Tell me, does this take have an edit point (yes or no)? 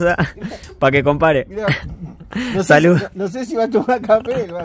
no